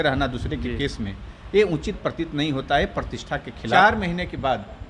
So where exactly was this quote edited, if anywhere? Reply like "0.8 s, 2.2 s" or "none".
3.8 s